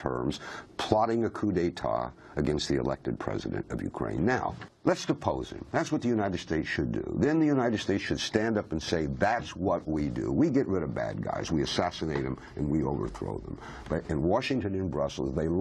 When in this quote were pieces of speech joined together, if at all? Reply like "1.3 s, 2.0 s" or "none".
4.7 s